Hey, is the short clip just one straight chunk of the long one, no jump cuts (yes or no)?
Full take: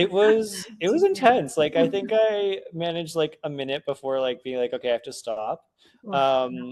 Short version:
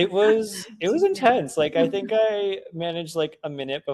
yes